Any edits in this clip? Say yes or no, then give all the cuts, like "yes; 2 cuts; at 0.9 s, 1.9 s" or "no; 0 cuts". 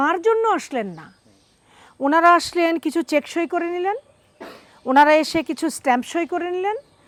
no; 0 cuts